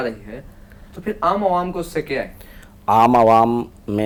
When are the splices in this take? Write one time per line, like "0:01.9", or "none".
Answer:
none